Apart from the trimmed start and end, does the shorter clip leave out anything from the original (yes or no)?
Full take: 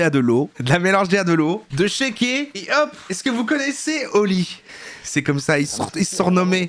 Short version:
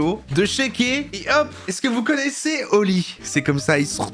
yes